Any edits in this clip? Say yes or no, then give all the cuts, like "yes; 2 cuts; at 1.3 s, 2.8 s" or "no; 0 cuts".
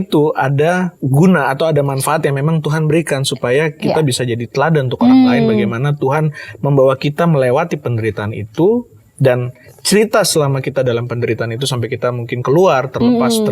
yes; 1 cut; at 1.0 s